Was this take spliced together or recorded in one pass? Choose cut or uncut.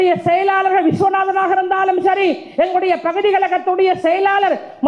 uncut